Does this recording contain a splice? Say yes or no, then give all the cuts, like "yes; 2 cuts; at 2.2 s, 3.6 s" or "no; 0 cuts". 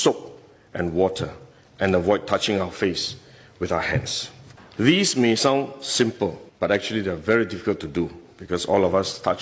no; 0 cuts